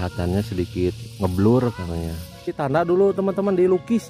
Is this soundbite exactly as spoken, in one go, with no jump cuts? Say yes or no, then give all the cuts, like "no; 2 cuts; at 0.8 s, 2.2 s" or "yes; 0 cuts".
no; 1 cut; at 2.6 s